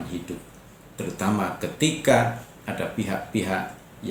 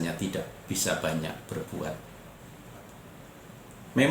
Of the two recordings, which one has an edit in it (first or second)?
second